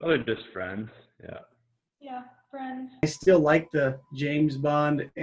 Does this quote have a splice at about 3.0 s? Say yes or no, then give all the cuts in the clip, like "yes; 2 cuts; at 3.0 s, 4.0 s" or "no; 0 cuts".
yes; 1 cut; at 3.0 s